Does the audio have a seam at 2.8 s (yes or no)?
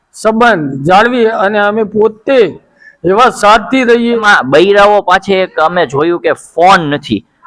no